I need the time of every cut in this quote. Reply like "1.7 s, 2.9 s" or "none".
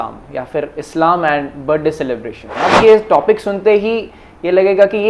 2.4 s